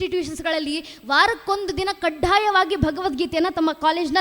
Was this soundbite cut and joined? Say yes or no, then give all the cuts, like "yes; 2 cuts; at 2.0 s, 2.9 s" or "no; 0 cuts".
no; 0 cuts